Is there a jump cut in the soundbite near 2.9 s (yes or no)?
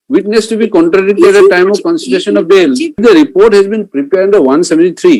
yes